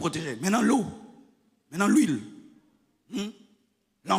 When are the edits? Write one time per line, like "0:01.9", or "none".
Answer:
none

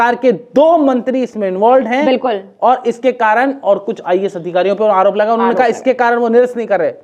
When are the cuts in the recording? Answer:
none

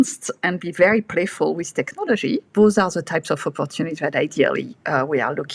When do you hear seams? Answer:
0:02.5

